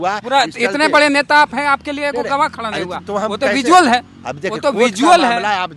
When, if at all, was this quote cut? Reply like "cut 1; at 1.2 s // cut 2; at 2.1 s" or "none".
none